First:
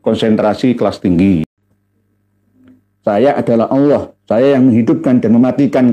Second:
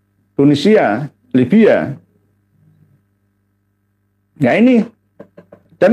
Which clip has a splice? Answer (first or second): first